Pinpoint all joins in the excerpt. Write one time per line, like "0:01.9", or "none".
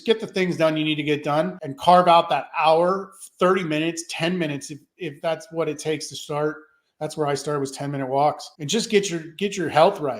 0:01.6
0:08.5

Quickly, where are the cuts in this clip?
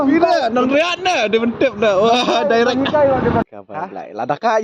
0:03.4

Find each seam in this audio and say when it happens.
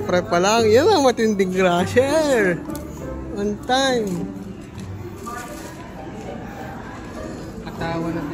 none

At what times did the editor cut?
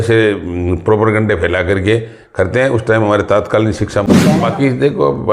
0:04.1

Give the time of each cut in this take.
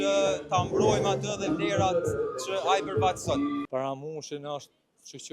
0:03.6

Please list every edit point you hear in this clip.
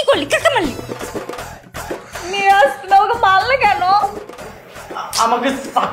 none

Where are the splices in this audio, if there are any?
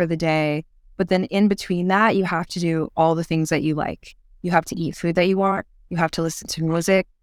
none

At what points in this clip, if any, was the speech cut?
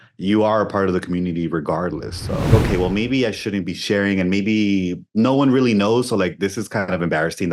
0:02.5

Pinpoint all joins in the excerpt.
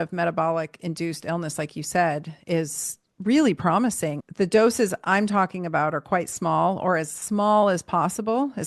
0:04.2

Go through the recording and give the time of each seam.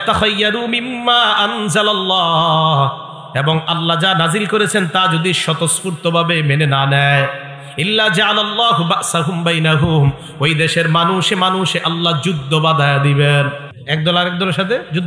0:13.7

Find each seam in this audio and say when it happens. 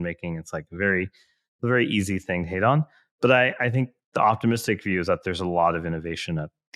none

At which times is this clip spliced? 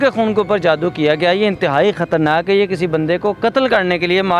none

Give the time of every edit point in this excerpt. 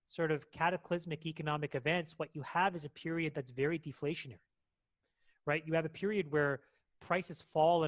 none

